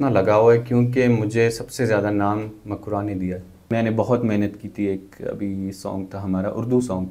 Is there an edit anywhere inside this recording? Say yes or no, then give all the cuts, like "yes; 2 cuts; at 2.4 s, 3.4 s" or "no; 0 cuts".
yes; 1 cut; at 3.7 s